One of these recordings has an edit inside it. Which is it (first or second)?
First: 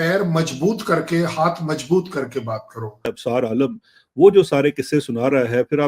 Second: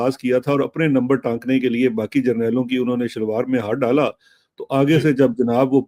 first